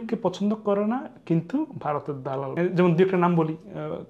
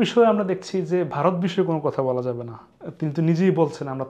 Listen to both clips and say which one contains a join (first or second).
first